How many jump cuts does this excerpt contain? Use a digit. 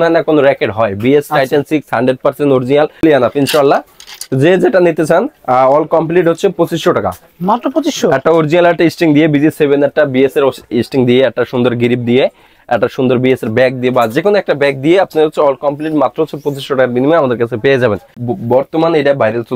2